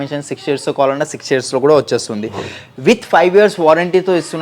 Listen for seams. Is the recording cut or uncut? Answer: uncut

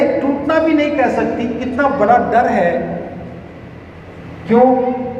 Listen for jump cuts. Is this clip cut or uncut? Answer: uncut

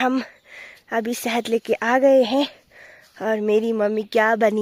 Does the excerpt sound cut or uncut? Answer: uncut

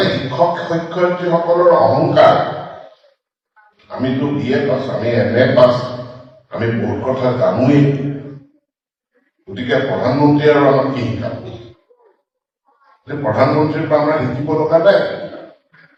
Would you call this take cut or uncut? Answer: uncut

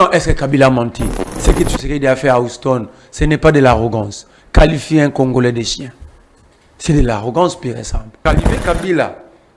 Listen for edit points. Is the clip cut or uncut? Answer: cut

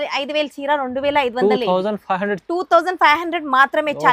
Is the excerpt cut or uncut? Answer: uncut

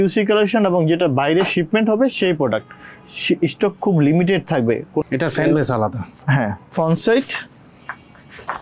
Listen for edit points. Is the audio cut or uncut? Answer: cut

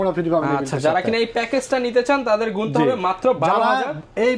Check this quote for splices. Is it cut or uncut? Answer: uncut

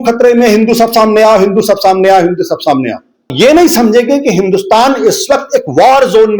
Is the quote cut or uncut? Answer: cut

